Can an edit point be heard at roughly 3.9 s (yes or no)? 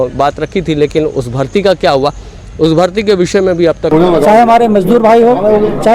yes